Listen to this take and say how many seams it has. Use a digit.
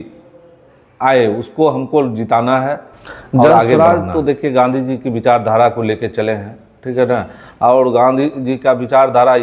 1